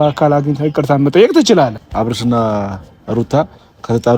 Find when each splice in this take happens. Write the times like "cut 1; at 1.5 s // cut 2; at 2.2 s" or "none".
cut 1; at 1.8 s